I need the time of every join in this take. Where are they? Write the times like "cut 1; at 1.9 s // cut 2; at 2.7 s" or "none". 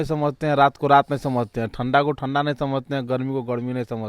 none